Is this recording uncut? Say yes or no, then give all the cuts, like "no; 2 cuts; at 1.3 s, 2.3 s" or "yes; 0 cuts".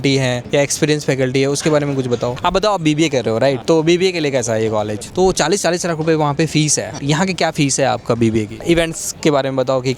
no; 4 cuts; at 2.4 s, 3.6 s, 5.0 s, 8.6 s